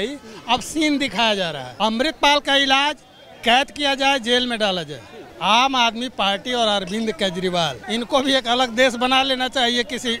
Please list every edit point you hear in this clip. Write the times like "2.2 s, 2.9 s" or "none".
1.6 s, 5.3 s, 7.8 s